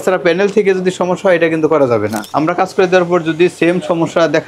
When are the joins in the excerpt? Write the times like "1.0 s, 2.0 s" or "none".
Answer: 2.2 s